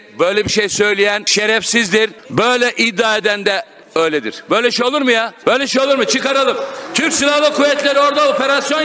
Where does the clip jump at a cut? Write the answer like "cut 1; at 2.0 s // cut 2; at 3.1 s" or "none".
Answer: cut 1; at 1.2 s // cut 2; at 2.2 s // cut 3; at 3.7 s // cut 4; at 5.3 s